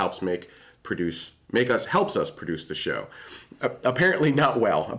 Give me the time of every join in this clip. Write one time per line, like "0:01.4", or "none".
0:03.4